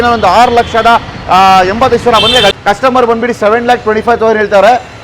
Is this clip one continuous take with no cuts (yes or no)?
no